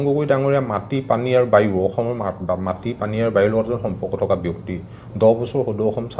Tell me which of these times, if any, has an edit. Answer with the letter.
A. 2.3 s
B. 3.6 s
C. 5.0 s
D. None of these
D